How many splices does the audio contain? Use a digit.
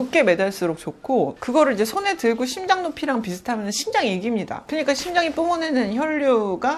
0